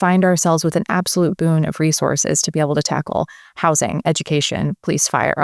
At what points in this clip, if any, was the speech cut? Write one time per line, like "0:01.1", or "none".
none